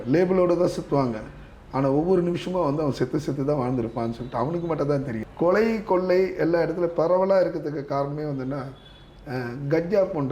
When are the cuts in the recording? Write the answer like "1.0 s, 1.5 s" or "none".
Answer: 5.2 s